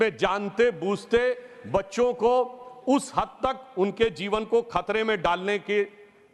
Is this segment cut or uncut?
uncut